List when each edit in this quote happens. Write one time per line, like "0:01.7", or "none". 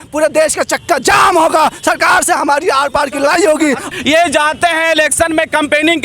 0:03.8